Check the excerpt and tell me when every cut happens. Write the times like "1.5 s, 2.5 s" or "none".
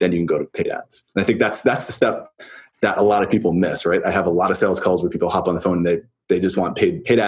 none

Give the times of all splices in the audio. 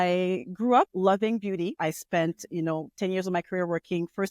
0.9 s, 1.8 s

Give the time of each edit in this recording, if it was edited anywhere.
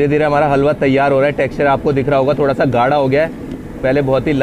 none

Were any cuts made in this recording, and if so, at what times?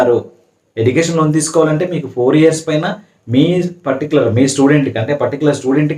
none

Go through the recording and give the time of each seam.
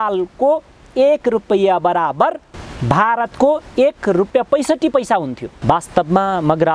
4.3 s, 5.4 s

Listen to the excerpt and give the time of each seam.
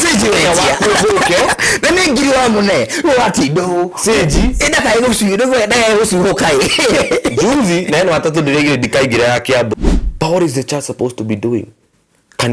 9.7 s

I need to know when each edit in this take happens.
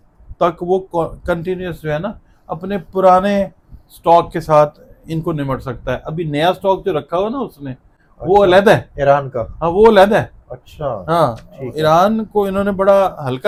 none

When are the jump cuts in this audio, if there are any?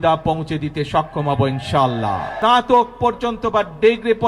2.3 s

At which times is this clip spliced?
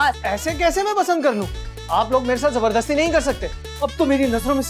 3.6 s

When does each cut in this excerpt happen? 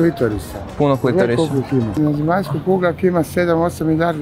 1.9 s

